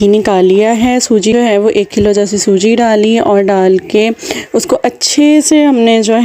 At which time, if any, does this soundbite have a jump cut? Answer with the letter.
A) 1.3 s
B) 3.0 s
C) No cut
A